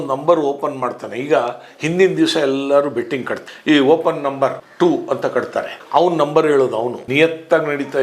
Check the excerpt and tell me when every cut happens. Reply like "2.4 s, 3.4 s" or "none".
4.6 s